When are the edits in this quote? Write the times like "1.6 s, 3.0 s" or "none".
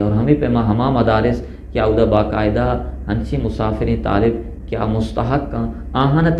none